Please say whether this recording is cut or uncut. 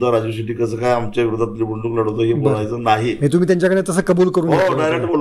uncut